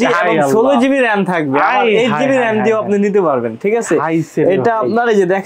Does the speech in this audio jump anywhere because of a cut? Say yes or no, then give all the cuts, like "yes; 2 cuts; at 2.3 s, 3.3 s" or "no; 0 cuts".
no; 0 cuts